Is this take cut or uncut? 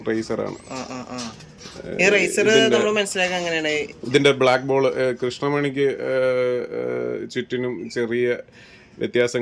uncut